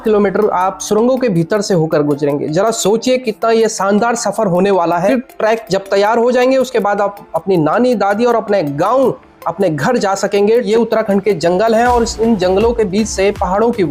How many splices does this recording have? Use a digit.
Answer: 2